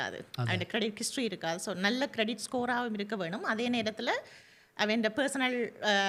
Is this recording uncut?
yes; 0 cuts

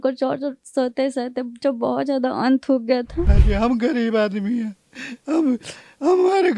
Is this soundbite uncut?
no; 1 cut; at 3.3 s

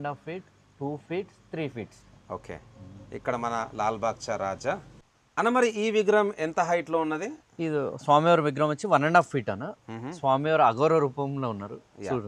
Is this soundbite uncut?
yes; 0 cuts

